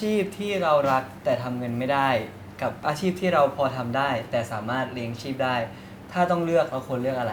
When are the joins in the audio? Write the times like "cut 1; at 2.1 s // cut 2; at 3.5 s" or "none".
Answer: none